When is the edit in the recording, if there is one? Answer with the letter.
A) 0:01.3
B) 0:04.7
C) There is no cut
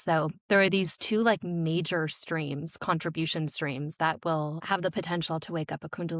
B